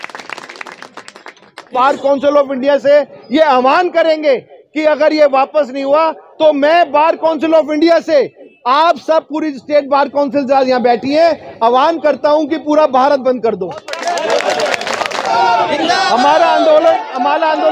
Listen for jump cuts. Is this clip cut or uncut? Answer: cut